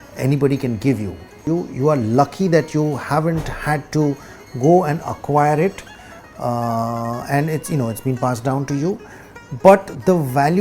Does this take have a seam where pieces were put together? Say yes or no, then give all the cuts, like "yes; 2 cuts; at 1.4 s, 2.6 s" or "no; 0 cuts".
yes; 1 cut; at 1.5 s